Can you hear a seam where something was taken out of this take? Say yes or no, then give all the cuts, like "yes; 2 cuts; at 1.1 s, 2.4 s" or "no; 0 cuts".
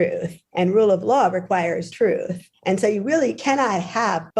no; 0 cuts